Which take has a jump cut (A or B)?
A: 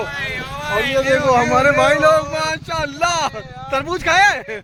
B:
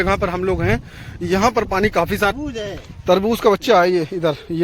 B